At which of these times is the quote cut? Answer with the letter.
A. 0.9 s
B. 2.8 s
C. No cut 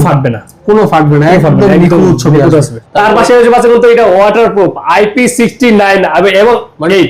B